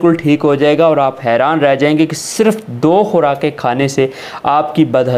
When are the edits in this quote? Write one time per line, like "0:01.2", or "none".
none